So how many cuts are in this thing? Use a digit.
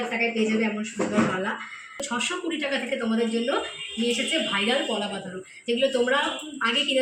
1